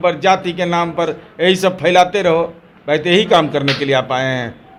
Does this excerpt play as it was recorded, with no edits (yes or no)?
yes